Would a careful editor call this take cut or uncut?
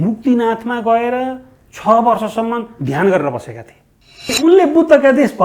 cut